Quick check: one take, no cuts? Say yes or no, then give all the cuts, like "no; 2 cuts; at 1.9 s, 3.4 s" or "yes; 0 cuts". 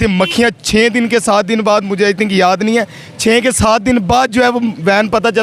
yes; 0 cuts